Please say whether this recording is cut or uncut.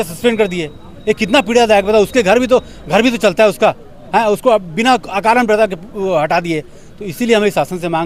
uncut